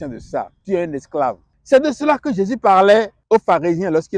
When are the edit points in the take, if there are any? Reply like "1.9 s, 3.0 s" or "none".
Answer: 1.5 s, 3.2 s